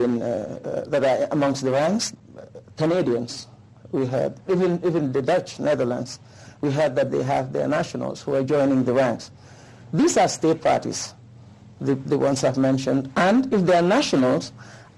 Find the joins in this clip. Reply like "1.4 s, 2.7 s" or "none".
2.1 s